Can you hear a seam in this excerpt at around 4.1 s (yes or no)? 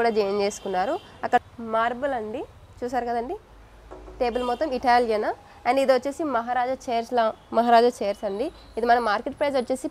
no